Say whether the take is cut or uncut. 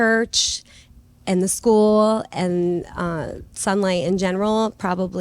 uncut